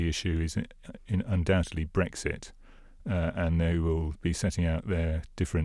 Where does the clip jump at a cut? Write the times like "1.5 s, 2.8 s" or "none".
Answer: none